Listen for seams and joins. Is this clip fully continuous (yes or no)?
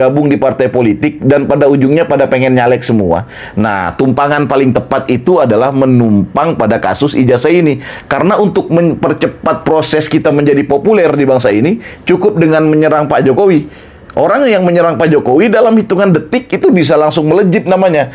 yes